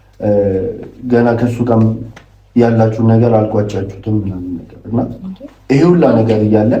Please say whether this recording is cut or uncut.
uncut